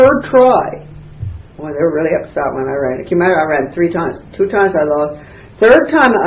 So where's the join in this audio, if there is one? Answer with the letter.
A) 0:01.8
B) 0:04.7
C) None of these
B